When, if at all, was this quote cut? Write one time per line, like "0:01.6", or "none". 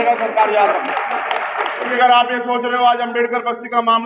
0:01.9